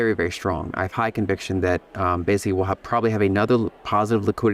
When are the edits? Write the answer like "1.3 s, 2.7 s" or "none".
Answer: none